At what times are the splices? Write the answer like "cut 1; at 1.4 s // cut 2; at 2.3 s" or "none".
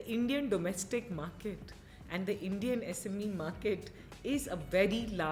none